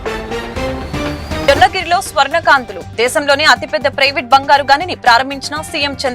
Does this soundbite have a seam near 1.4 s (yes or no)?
yes